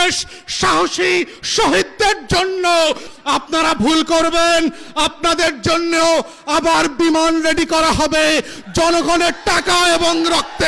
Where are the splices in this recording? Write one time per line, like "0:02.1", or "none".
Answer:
0:03.1

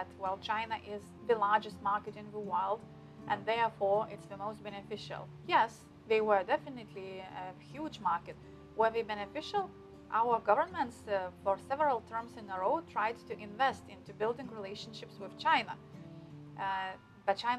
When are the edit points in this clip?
0:01.1

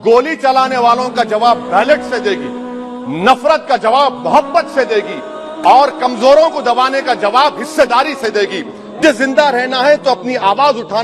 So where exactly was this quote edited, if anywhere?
0:09.0

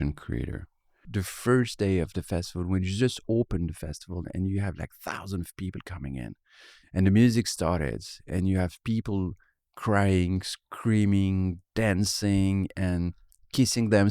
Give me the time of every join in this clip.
0:01.0

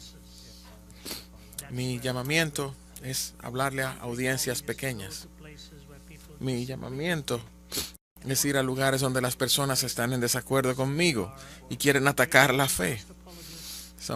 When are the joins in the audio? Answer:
0:06.8

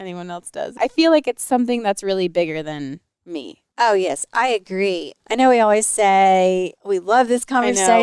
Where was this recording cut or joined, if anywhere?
0:00.7
0:05.1

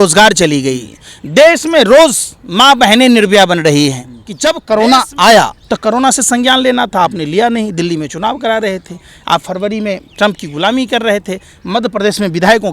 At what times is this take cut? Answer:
0:04.3
0:05.6

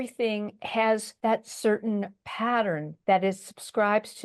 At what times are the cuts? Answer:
0:01.1
0:02.9

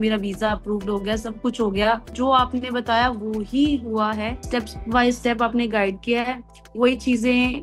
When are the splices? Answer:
0:02.1
0:04.4

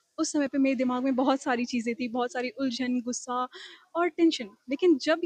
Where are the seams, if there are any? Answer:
none

